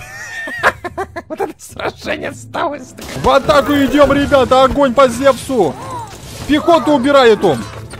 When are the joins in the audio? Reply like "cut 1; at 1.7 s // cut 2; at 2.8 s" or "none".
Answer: cut 1; at 3.2 s